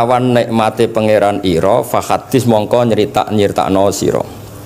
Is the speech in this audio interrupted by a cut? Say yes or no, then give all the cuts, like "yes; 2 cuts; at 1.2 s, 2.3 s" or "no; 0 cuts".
no; 0 cuts